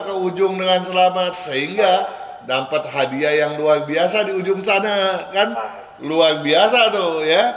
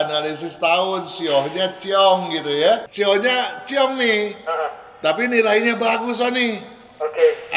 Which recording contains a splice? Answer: second; 1 cut; at 2.9 s

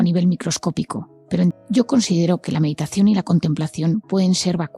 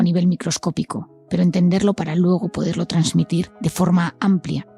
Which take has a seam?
first; 1 cut; at 1.5 s

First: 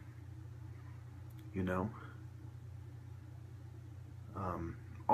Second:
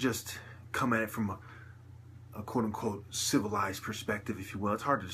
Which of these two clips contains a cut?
second; 1 cut; at 2.8 s

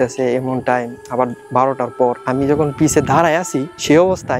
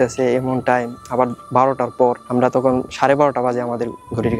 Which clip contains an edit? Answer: first; 1 cut; at 2.2 s

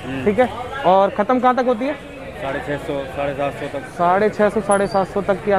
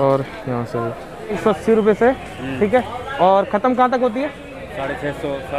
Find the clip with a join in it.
second; 1 cut; at 1.4 s

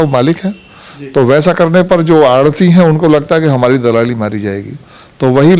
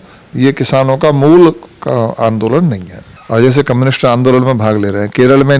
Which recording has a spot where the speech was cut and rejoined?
second; 1 cut; at 3.1 s

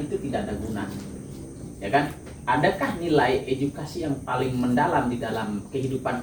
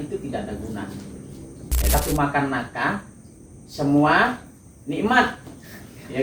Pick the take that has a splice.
second; 1 cut; at 1.9 s

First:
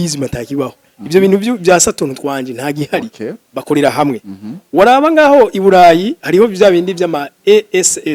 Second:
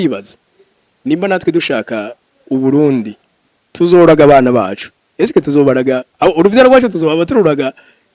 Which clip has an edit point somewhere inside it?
second; 1 cut; at 6.1 s

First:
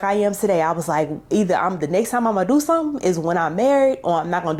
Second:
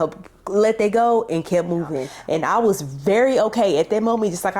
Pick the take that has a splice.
second; 1 cut; at 2.1 s

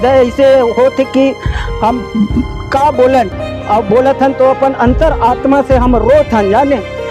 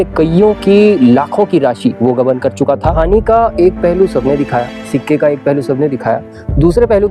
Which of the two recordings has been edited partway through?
second; 1 cut; at 2.9 s

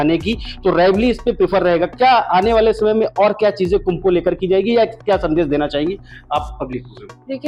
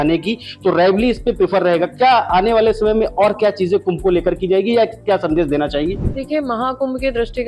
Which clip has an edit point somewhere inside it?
second; 1 cut; at 6.1 s

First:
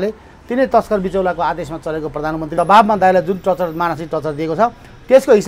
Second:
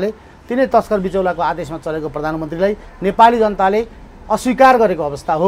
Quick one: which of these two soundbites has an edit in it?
first; 1 cut; at 2.5 s

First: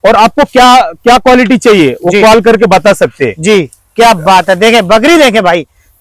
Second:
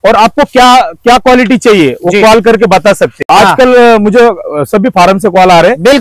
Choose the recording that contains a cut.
second; 1 cut; at 3.1 s

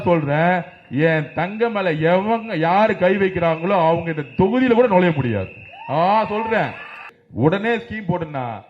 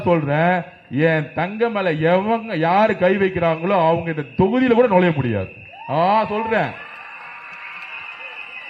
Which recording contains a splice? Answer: first; 1 cut; at 7.2 s

